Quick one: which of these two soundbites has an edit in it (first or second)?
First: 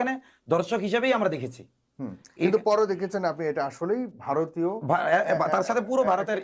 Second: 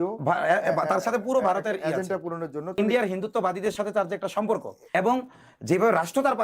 second